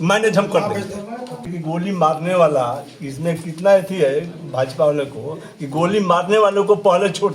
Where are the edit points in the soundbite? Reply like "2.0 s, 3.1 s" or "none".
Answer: 1.5 s